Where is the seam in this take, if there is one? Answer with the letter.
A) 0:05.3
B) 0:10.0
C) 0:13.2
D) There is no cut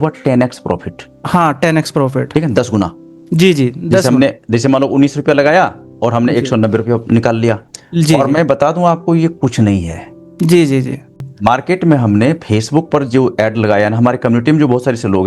D